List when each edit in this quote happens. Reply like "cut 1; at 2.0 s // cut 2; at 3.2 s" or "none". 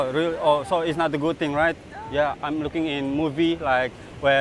none